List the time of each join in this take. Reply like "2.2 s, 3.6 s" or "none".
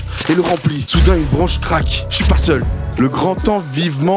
2.8 s